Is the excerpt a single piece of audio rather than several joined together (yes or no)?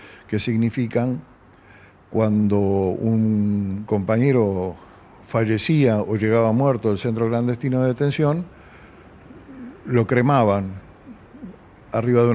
yes